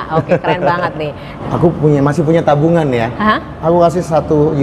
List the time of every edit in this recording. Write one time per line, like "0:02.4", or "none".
0:01.3